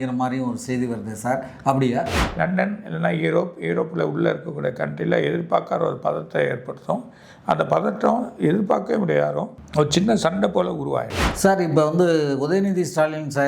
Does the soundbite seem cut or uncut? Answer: cut